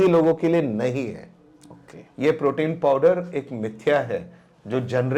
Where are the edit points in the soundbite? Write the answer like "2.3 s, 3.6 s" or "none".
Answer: none